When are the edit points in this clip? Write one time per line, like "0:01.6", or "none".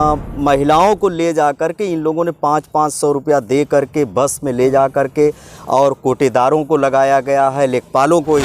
none